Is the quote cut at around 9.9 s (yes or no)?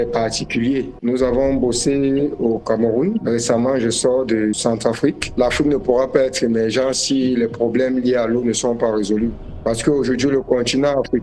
no